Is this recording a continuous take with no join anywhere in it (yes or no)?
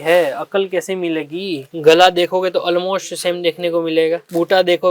no